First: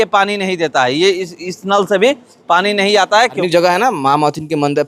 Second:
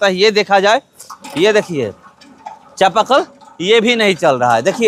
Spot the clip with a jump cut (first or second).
first